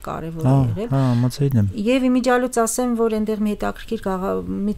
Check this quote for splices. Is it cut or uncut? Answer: uncut